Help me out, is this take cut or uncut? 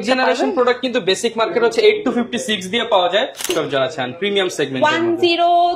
cut